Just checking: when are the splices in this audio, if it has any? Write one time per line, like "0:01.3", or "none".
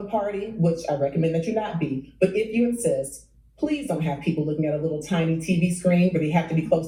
none